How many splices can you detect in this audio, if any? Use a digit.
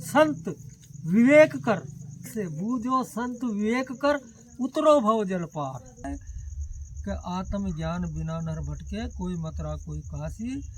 2